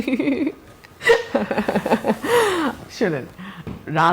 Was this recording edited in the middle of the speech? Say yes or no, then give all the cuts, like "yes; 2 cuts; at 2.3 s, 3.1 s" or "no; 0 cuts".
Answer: no; 0 cuts